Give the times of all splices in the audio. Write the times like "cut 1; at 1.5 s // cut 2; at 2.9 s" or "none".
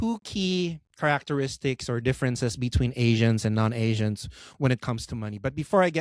none